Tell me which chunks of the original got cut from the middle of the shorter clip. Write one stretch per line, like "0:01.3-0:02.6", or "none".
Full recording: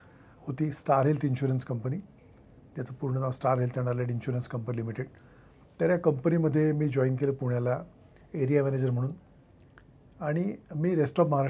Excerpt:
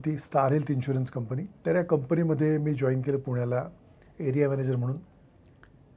0:02.0-0:05.6